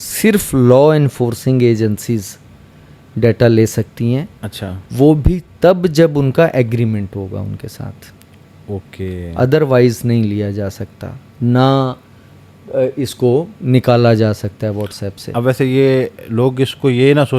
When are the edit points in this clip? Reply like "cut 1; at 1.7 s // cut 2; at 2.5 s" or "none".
none